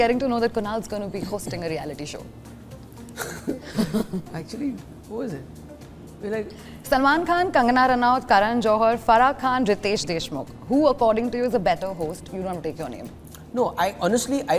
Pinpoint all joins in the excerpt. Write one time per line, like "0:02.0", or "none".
0:06.6